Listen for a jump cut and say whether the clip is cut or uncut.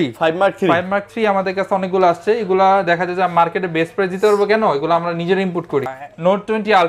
cut